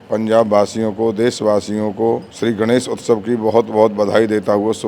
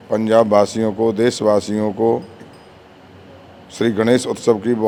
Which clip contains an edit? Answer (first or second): first